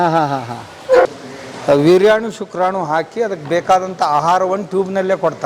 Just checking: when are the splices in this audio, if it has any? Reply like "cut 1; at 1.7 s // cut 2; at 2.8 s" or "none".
cut 1; at 1.1 s